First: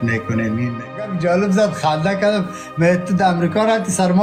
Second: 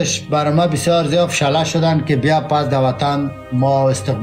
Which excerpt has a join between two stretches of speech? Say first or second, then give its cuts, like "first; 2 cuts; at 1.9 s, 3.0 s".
first; 1 cut; at 1.1 s